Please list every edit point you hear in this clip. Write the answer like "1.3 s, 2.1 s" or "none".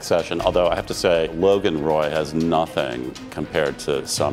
1.3 s